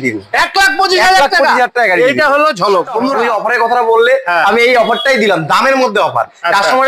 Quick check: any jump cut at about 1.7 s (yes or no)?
no